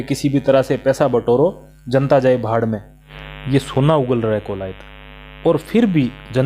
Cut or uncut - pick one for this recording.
cut